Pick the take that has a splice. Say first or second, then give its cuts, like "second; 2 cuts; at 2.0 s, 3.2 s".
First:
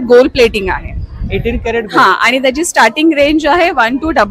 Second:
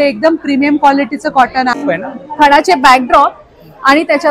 second; 1 cut; at 1.8 s